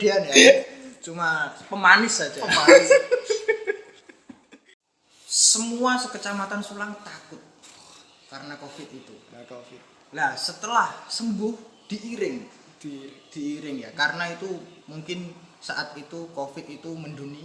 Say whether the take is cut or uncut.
cut